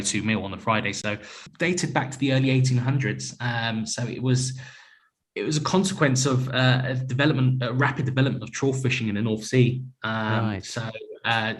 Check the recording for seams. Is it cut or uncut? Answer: cut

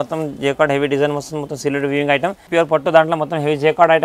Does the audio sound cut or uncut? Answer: cut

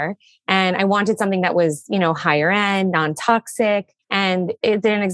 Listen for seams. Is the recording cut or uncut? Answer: uncut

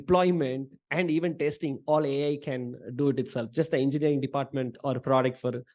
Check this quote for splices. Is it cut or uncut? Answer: uncut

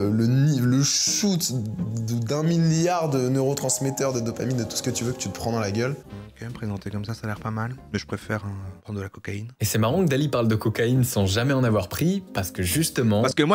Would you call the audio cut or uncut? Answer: cut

